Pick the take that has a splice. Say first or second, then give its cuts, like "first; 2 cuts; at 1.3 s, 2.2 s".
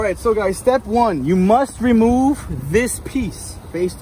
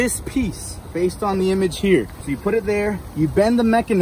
second; 1 cut; at 2.2 s